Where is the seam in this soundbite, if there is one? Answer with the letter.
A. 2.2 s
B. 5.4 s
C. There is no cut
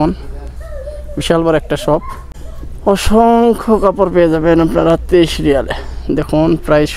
A